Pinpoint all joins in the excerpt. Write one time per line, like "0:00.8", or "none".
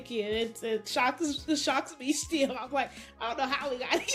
none